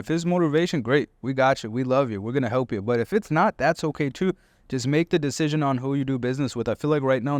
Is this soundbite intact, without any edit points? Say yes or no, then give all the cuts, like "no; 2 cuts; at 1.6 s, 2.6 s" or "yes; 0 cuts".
yes; 0 cuts